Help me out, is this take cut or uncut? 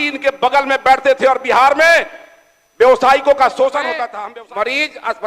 cut